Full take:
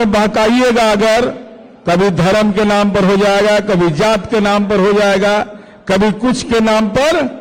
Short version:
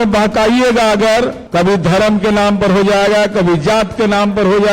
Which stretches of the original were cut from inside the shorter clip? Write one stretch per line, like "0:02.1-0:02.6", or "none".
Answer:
0:01.4-0:01.7